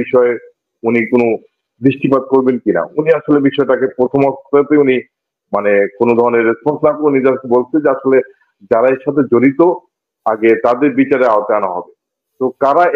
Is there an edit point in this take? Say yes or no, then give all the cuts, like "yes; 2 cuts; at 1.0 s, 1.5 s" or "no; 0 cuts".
no; 0 cuts